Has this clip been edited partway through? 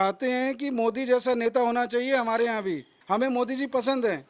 yes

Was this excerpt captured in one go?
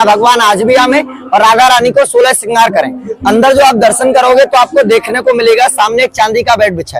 yes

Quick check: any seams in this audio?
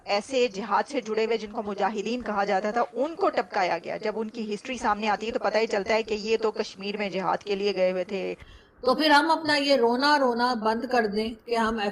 yes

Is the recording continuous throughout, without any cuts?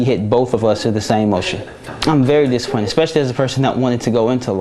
no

